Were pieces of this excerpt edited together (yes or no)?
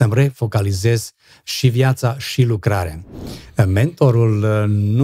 yes